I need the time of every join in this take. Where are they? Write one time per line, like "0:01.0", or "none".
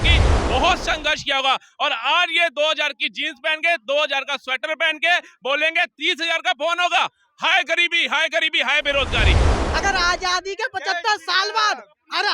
0:09.5